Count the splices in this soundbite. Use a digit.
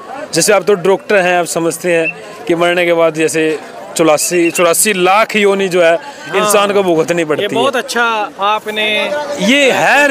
0